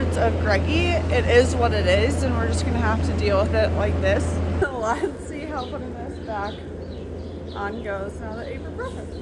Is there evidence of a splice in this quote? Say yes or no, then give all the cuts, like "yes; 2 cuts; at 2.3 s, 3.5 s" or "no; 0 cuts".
yes; 1 cut; at 4.6 s